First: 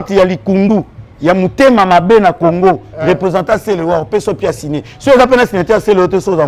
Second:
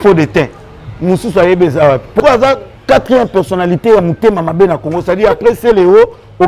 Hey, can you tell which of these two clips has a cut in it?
second; 1 cut; at 2.2 s

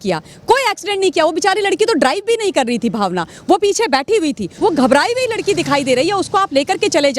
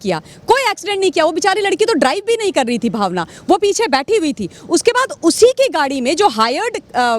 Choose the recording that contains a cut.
first; 1 cut; at 4.5 s

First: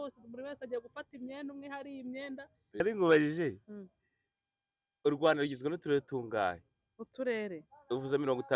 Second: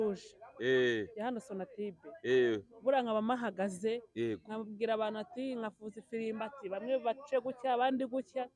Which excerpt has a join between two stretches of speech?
first; 1 cut; at 2.8 s

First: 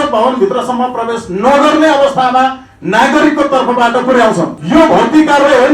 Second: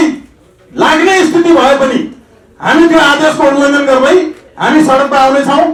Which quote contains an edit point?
first; 1 cut; at 4.6 s

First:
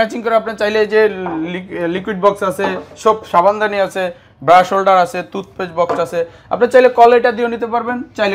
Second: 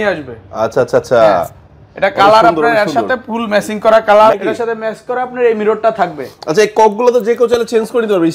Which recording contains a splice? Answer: second; 1 cut; at 4.3 s

